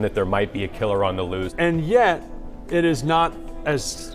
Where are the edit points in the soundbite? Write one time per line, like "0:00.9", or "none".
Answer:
0:01.5